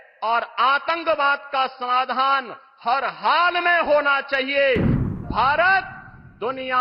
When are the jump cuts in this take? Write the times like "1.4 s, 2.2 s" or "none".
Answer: 5.1 s